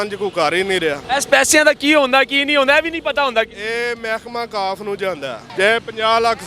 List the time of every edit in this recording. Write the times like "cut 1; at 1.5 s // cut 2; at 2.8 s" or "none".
cut 1; at 1.0 s // cut 2; at 5.4 s